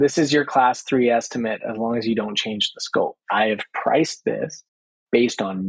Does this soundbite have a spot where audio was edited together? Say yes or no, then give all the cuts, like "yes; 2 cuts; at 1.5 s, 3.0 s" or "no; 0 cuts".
yes; 1 cut; at 3.2 s